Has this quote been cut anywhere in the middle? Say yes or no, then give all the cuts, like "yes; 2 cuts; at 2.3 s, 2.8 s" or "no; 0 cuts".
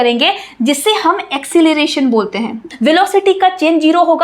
yes; 1 cut; at 2.7 s